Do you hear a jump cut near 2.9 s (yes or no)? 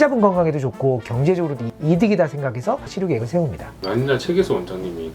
yes